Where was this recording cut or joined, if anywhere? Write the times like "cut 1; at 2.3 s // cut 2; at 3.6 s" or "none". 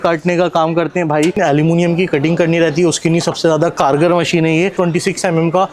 cut 1; at 1.4 s // cut 2; at 4.7 s